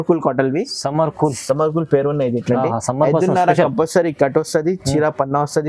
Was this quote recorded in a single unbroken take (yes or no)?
yes